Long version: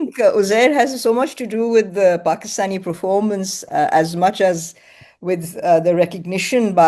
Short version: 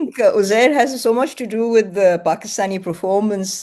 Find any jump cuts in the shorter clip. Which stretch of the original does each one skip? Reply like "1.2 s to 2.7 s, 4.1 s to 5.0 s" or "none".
none